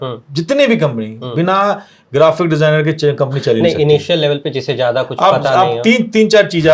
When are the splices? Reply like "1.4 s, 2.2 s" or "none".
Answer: none

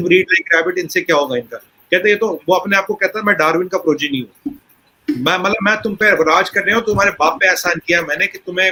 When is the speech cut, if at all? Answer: none

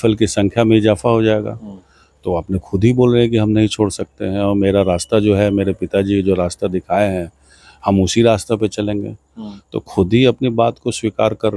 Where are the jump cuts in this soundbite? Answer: none

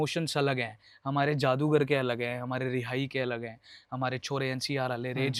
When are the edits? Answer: none

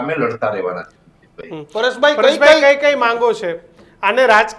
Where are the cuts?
none

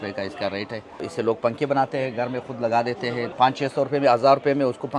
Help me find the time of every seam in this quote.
1.0 s, 3.3 s

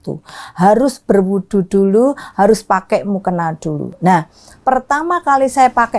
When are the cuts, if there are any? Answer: none

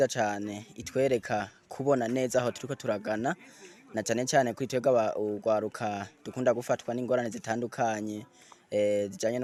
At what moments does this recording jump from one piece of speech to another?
none

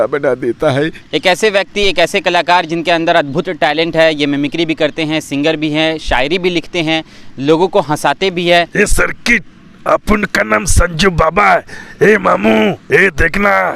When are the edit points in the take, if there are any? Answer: 1.0 s, 8.7 s

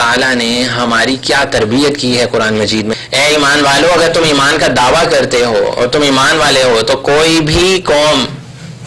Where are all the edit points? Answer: 3.0 s

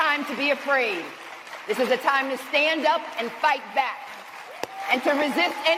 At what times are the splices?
none

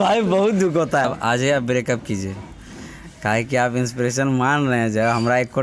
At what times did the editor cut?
1.1 s

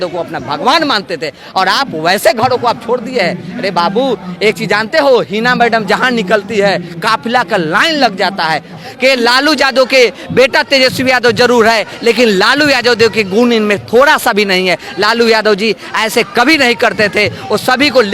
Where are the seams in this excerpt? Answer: 8.8 s

